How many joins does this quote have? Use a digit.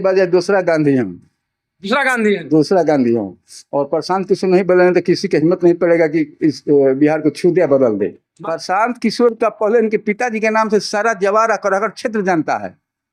1